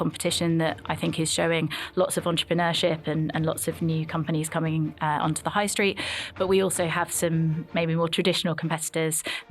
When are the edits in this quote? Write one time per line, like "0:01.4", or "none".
none